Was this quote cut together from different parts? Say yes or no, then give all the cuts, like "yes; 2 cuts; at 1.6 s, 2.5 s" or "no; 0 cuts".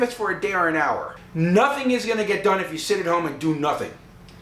yes; 1 cut; at 1.2 s